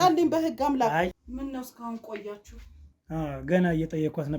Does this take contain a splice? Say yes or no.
yes